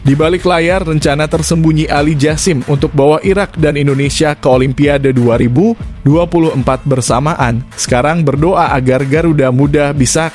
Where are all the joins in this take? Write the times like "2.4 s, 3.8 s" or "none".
none